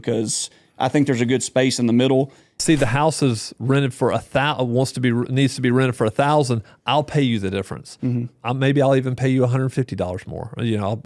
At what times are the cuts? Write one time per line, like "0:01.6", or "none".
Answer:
0:02.6